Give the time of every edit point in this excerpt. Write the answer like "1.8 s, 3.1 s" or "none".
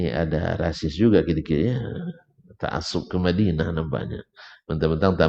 none